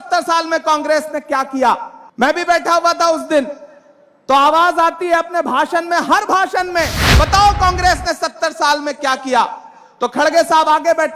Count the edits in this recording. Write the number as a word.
one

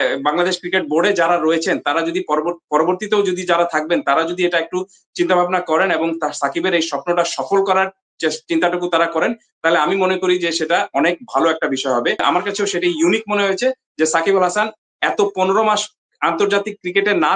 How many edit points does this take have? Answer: one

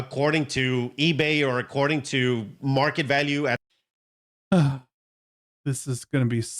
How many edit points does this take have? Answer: one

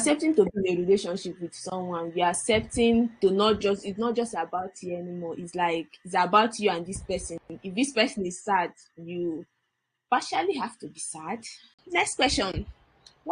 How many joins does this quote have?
one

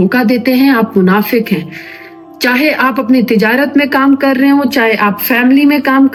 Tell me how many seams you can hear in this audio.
zero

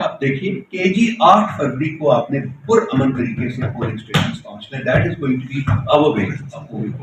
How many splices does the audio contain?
zero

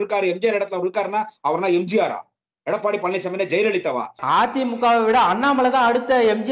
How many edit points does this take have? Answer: one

